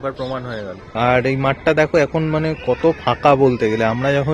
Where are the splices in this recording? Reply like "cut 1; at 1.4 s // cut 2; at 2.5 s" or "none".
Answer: cut 1; at 1.0 s